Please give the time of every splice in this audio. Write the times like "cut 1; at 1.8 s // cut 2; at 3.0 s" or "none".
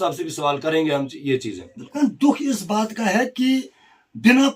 cut 1; at 1.9 s